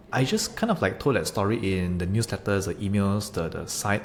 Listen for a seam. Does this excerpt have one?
no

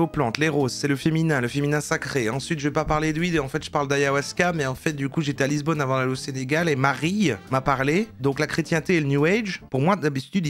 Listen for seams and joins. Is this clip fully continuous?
yes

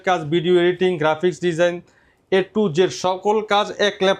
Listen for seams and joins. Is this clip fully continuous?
yes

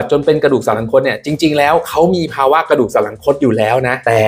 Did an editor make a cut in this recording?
no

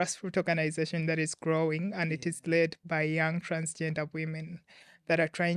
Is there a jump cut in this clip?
no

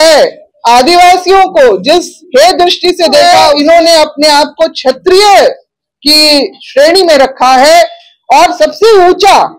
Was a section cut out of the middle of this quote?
yes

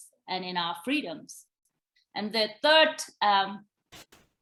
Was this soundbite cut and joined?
no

